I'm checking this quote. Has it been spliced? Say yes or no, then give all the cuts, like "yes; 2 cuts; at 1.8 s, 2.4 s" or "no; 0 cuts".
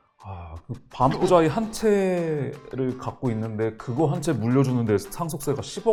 no; 0 cuts